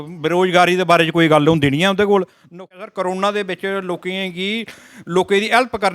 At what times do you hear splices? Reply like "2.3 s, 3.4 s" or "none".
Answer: 2.7 s